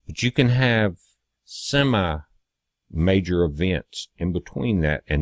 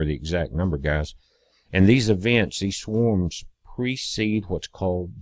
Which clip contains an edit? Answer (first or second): first